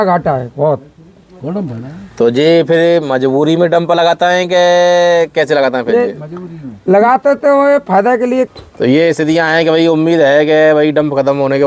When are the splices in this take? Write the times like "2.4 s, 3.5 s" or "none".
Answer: 8.5 s